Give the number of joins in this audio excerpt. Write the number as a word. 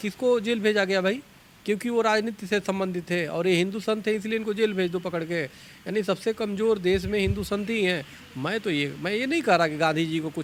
zero